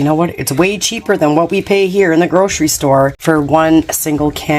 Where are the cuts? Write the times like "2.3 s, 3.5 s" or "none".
3.2 s

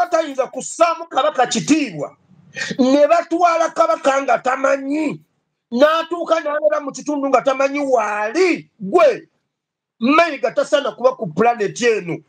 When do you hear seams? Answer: 1.2 s

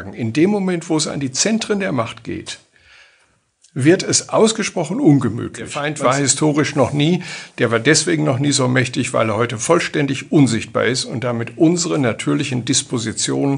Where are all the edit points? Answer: 5.8 s

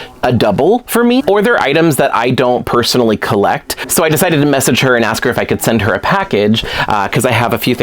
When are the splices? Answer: 1.2 s, 3.7 s

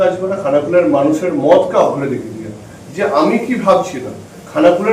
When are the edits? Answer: none

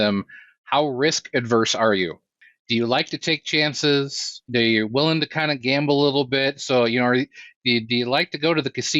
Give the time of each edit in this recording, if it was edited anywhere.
4.5 s

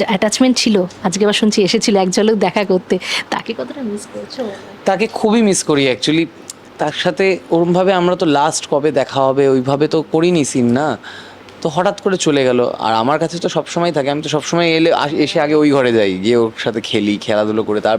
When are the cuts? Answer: none

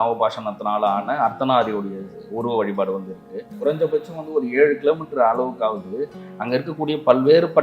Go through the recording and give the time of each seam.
3.5 s

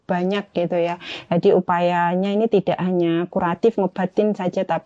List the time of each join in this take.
none

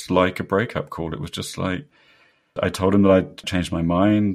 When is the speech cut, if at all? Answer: 2.5 s, 3.4 s

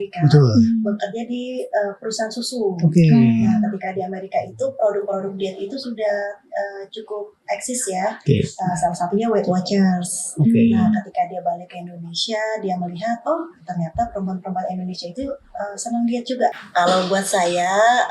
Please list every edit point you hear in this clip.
16.5 s

